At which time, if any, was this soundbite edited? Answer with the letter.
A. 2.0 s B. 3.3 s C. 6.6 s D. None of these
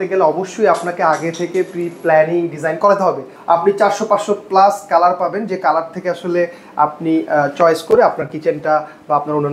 B